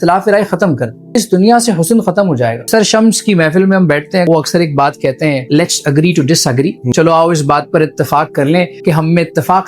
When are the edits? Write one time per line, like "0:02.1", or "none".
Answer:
0:01.2
0:02.7
0:04.3
0:05.4
0:06.9
0:08.7